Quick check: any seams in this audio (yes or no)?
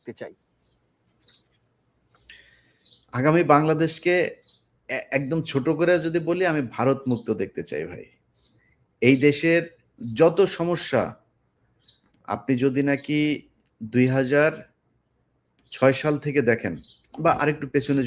no